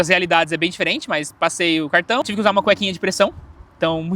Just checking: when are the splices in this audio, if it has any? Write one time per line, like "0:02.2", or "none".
0:02.3